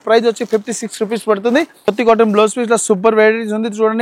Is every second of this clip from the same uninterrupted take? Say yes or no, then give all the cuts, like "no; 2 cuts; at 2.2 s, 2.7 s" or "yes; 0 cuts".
no; 1 cut; at 1.9 s